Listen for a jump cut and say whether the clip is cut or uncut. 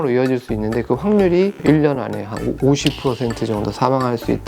uncut